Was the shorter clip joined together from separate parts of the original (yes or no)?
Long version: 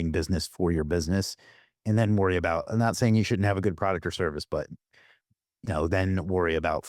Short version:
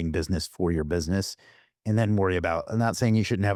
no